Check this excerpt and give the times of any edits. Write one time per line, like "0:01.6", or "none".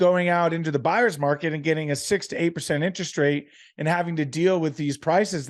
none